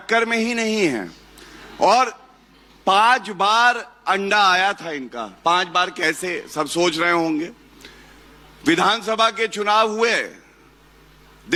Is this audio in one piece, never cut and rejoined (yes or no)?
yes